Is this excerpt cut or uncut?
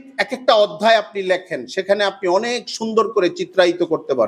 uncut